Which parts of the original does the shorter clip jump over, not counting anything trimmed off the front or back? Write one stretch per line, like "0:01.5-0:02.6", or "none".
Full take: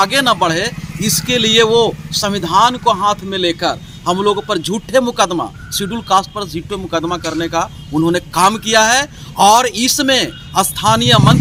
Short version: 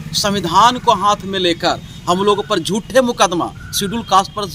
none